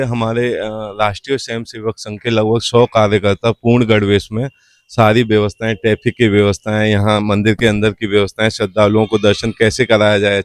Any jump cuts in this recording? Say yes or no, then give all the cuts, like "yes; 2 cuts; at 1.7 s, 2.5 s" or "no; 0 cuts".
no; 0 cuts